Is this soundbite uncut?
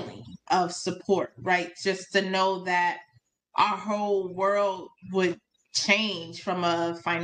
yes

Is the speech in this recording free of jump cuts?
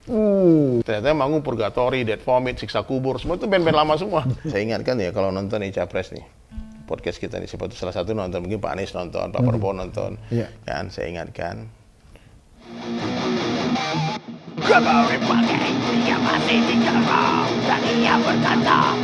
no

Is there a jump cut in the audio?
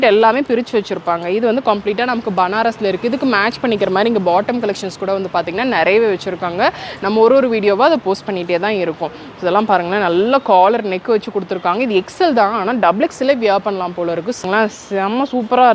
yes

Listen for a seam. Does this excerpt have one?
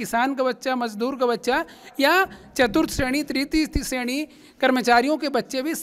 no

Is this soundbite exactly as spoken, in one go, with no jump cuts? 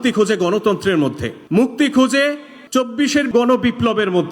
no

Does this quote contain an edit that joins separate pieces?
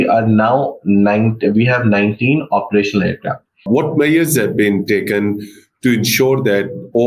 yes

